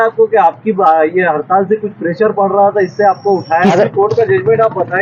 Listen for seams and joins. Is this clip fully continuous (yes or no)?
no